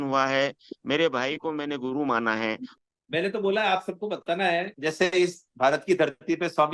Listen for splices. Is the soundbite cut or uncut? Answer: cut